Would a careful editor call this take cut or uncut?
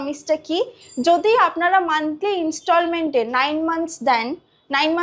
uncut